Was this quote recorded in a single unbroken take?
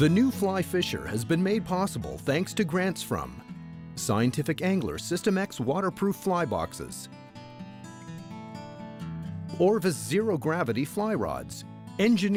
yes; 0 cuts

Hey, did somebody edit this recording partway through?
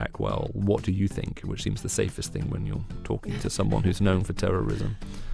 no; 0 cuts

